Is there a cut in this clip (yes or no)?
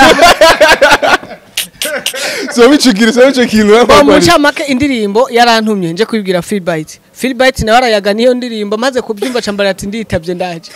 no